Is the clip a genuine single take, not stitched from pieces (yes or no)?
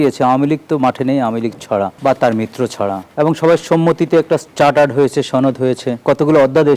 no